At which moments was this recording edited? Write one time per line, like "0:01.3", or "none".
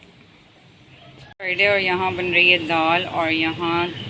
0:01.4